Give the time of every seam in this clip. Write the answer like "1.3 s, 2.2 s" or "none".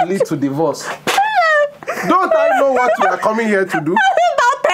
1.8 s